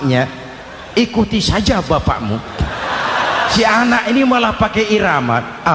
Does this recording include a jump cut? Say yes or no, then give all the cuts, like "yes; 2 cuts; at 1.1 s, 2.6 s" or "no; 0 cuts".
yes; 1 cut; at 3.5 s